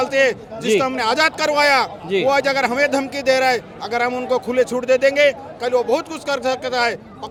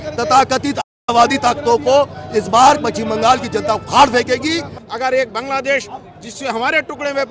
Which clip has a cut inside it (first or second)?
second